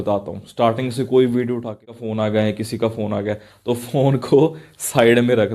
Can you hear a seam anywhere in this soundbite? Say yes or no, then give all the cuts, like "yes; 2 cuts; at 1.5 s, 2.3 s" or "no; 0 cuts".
yes; 1 cut; at 2.0 s